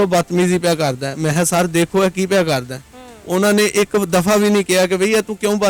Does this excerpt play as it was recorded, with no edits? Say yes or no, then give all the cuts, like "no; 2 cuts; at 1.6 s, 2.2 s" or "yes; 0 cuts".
yes; 0 cuts